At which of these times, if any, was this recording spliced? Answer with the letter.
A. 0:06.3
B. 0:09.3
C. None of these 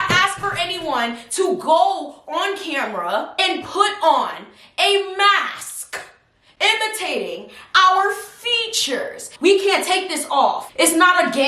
B